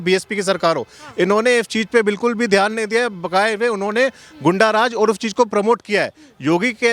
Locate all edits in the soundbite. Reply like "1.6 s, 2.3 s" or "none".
none

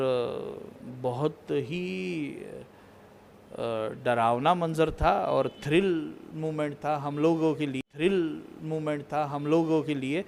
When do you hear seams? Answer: none

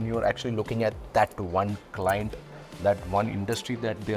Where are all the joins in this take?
none

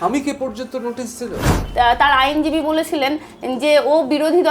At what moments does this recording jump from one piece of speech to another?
1.4 s

